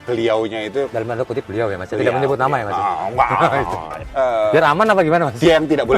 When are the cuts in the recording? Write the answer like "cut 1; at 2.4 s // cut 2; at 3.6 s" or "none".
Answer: cut 1; at 0.9 s // cut 2; at 3.9 s